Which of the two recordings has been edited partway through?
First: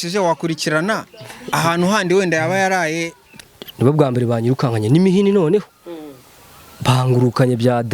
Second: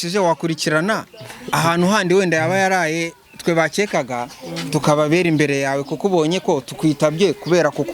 first; 1 cut; at 3.3 s

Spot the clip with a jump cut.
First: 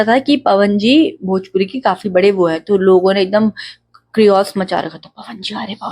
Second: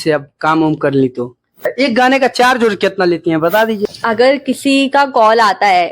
second; 2 cuts; at 1.6 s, 3.8 s

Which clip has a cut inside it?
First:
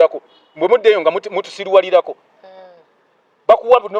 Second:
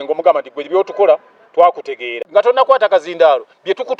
second; 1 cut; at 2.1 s

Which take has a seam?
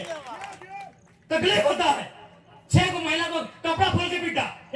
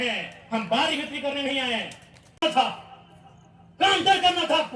second; 1 cut; at 2.4 s

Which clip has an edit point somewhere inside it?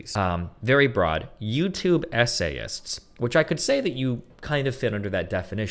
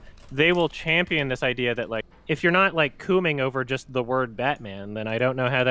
second; 1 cut; at 2.1 s

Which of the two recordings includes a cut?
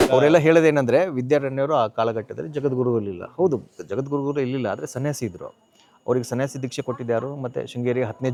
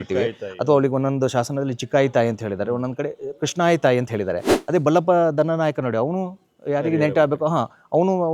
second; 1 cut; at 4.5 s

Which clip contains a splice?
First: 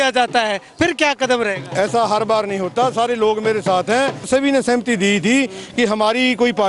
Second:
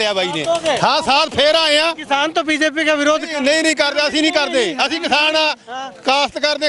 first; 1 cut; at 4.3 s

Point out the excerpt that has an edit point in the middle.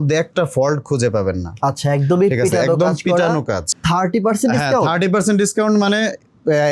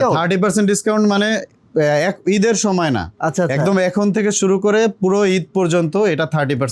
first; 1 cut; at 3.7 s

